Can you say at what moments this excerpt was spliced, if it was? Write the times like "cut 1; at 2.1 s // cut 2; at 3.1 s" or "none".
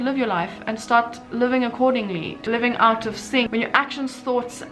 none